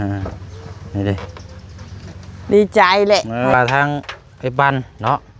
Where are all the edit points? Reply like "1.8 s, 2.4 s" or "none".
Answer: 3.5 s

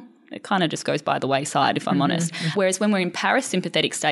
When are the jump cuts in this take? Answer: 2.5 s

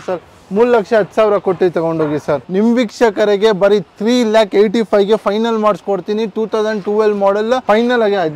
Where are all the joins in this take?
2.5 s, 7.6 s

